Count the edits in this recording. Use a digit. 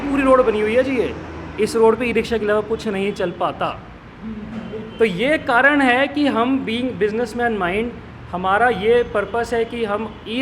0